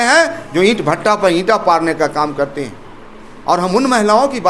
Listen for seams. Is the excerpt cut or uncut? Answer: uncut